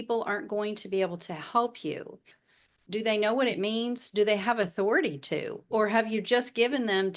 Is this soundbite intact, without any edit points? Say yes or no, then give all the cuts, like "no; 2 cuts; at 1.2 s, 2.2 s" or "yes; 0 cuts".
no; 1 cut; at 2.3 s